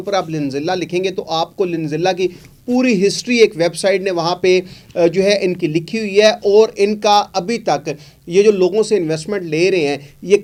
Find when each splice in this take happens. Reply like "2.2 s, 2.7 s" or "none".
none